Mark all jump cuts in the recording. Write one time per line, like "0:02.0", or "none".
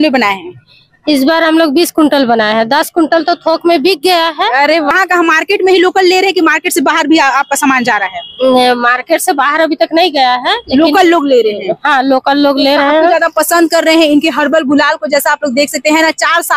none